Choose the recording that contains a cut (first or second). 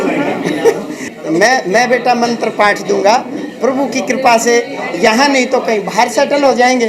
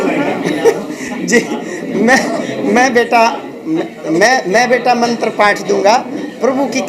first